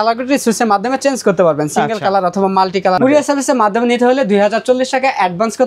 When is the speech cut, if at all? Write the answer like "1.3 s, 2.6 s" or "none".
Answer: 3.0 s